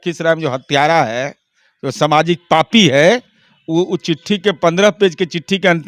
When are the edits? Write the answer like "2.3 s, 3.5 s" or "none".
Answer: none